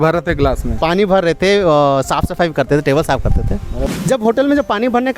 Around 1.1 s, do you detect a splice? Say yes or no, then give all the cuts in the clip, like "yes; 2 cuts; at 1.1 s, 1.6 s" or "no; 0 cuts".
no; 1 cut; at 3.8 s